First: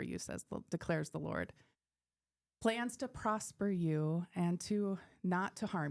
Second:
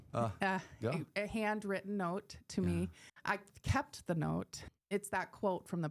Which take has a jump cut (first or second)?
second